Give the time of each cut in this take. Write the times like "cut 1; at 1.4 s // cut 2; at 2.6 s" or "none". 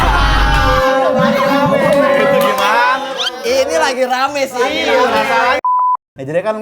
cut 1; at 3.1 s // cut 2; at 5.6 s

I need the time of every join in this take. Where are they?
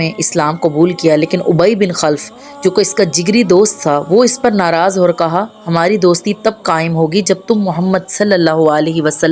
none

